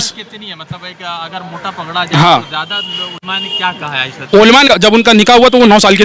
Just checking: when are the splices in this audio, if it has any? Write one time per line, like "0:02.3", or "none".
0:04.7